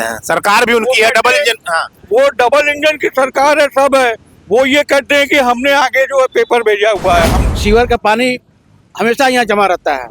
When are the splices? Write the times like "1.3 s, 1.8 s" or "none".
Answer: 7.4 s

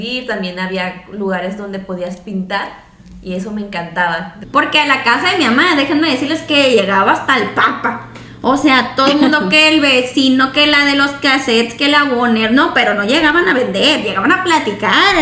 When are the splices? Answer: 4.3 s

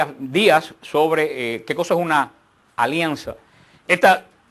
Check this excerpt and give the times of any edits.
none

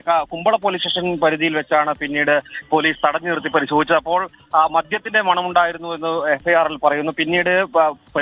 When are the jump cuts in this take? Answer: none

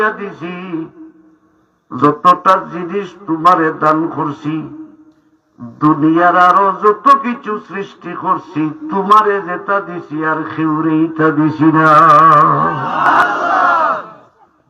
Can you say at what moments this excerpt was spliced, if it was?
2.0 s, 13.2 s

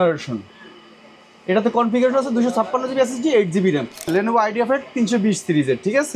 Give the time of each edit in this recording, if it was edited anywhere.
4.1 s

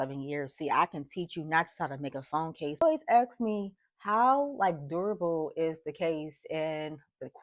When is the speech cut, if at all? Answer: 2.8 s

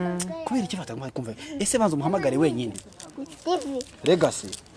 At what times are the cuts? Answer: 2.8 s

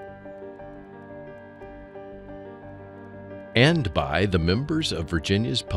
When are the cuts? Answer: 3.5 s

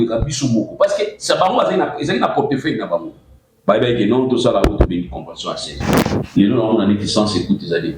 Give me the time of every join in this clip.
6.0 s

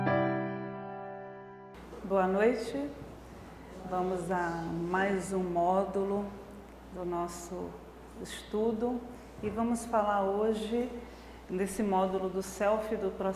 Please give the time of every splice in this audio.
none

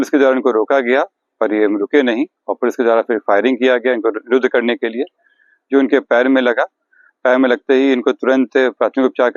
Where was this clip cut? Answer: none

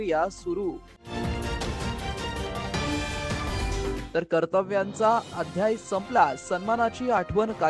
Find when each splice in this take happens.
1.0 s, 4.0 s

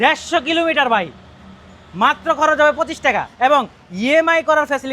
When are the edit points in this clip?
3.3 s

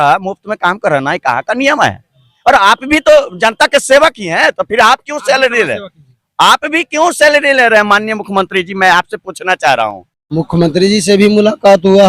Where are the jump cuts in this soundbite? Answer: 10.1 s

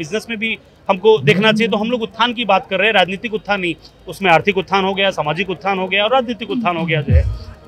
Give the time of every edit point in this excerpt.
none

